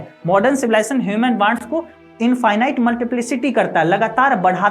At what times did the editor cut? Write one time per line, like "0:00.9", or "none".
0:01.6